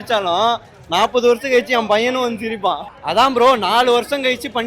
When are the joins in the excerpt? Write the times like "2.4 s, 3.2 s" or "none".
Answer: 2.9 s